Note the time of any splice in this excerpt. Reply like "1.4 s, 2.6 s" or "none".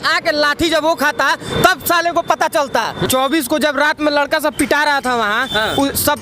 3.1 s